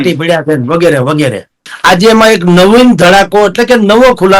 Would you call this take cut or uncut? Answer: cut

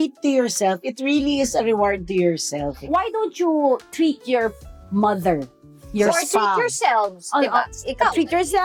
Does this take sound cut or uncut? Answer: uncut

